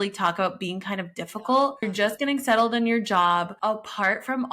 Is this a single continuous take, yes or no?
no